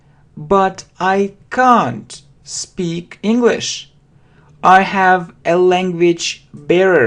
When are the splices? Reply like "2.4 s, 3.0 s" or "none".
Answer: 1.4 s